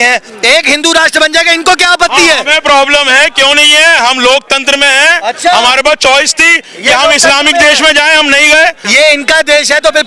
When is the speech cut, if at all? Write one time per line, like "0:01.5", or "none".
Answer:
0:08.8